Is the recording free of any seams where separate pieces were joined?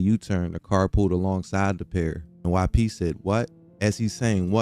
no; 1 cut; at 2.4 s

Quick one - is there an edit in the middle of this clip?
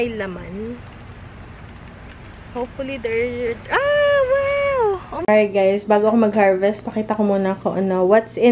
yes; 1 cut; at 5.1 s

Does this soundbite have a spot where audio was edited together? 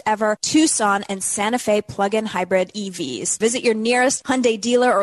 yes; 1 cut; at 3.3 s

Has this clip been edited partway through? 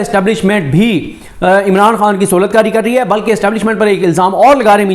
no; 0 cuts

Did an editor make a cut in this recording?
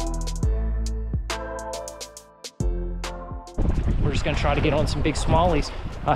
yes; 1 cut; at 3.6 s

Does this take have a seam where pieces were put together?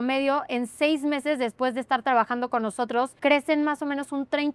yes; 1 cut; at 3.1 s

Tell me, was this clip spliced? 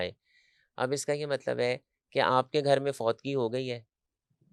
no; 0 cuts

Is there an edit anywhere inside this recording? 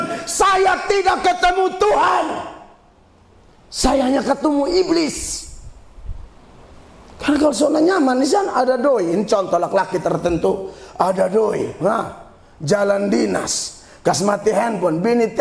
no; 0 cuts

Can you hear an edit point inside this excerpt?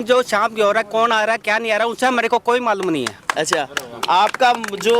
no; 0 cuts

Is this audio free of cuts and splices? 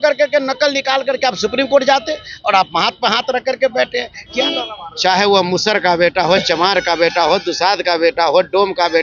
no; 1 cut; at 4.4 s

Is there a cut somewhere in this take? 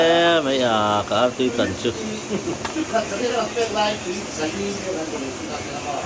no; 0 cuts

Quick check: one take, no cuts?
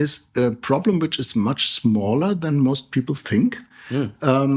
yes; 0 cuts

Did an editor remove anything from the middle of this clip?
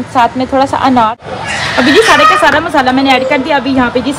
yes; 1 cut; at 1.1 s

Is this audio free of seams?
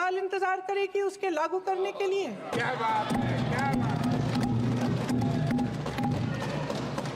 yes; 0 cuts

